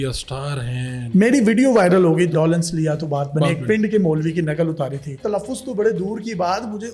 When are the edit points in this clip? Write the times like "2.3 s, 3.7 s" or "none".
1.0 s, 2.3 s, 5.2 s

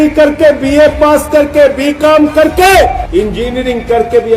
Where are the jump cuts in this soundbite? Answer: 3.0 s

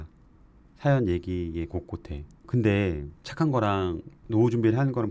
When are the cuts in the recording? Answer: 2.4 s, 3.2 s, 4.1 s

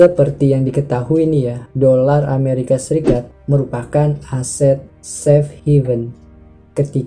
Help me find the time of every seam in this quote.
none

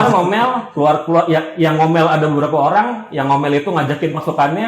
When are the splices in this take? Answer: none

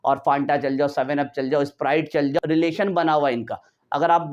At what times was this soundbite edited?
2.4 s

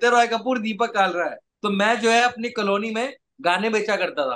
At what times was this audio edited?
1.5 s

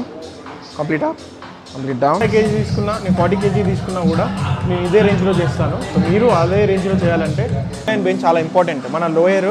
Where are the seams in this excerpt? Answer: 2.2 s, 7.9 s

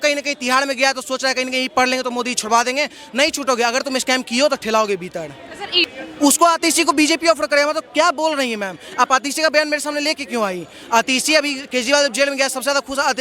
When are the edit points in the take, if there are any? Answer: 5.9 s

